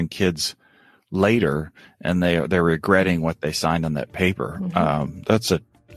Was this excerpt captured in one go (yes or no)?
yes